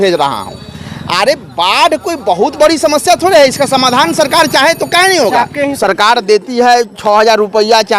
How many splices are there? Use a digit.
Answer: 1